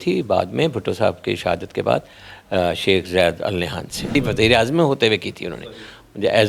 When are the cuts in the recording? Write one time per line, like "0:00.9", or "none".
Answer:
0:04.1